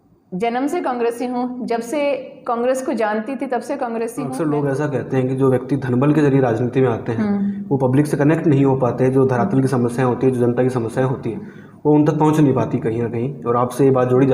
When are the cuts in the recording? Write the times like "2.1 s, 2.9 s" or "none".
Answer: 4.3 s